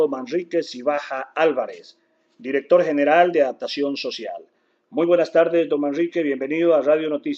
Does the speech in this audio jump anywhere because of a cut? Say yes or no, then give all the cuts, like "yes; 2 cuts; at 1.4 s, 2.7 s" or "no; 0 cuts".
yes; 1 cut; at 5.8 s